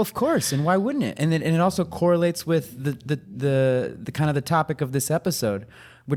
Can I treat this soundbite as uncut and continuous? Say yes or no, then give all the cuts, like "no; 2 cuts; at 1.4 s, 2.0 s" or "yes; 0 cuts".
yes; 0 cuts